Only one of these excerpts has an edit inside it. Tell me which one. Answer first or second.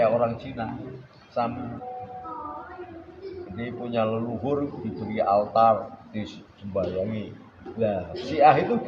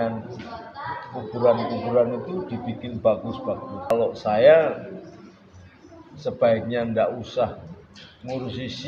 second